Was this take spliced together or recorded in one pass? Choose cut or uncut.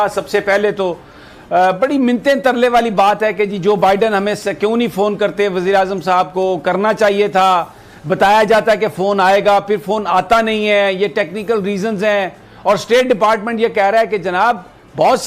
uncut